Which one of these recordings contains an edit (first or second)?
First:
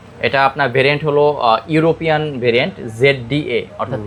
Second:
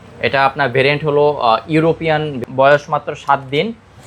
second